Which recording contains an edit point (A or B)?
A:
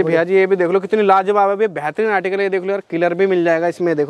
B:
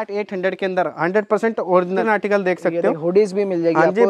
B